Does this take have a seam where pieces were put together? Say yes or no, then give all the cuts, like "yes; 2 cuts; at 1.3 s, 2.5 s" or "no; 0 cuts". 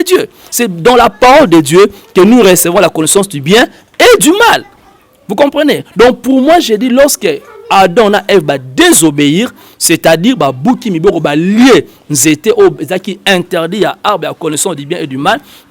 no; 0 cuts